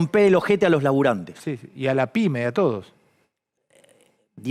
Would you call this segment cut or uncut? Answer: uncut